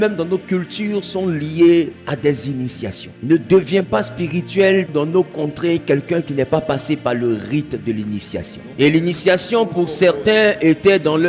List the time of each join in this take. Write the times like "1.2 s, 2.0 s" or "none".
2.0 s, 3.1 s, 4.9 s, 8.6 s

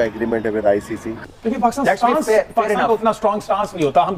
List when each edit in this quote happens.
1.1 s

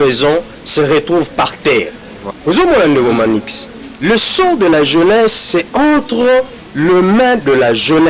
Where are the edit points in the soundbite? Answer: 2.3 s

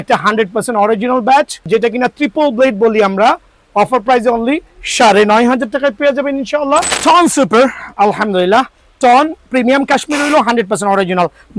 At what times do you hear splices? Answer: 1.7 s, 6.9 s

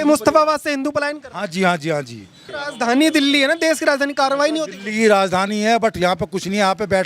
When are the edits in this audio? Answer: 2.5 s

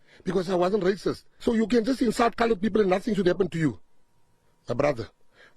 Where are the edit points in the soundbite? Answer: 1.3 s

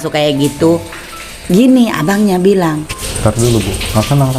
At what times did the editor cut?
2.9 s

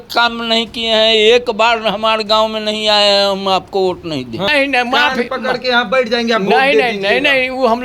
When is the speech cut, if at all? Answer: 4.5 s

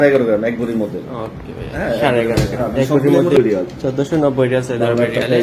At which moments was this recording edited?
3.4 s

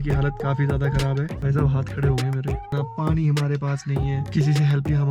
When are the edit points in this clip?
1.3 s

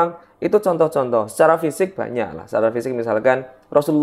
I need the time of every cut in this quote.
none

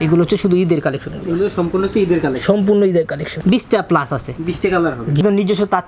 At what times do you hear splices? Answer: 3.3 s, 5.2 s

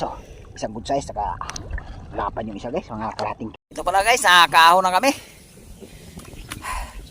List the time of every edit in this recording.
3.5 s

